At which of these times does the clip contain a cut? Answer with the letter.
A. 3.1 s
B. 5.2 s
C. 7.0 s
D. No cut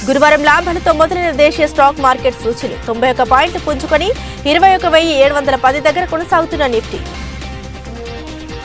C